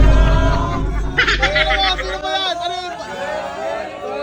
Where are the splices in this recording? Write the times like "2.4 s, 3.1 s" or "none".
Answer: none